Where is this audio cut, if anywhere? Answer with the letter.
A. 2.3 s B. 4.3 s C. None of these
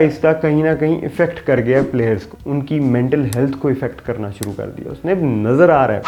A